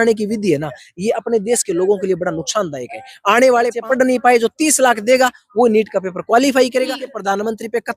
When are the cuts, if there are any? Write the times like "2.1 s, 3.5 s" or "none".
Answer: 3.8 s, 7.0 s